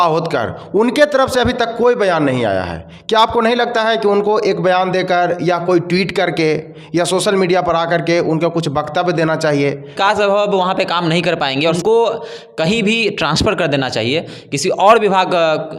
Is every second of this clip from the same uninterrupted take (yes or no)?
no